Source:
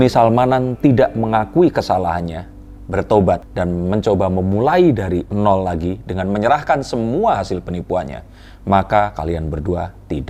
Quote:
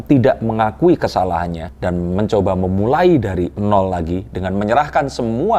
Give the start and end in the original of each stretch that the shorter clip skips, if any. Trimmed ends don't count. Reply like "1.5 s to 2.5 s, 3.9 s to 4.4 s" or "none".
2.5 s to 3.5 s